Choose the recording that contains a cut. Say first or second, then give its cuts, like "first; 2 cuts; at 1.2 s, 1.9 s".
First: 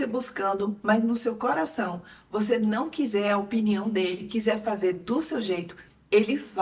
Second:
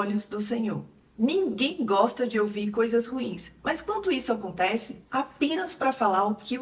second; 2 cuts; at 0.9 s, 5.0 s